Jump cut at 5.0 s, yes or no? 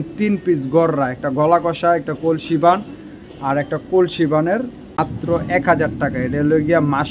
yes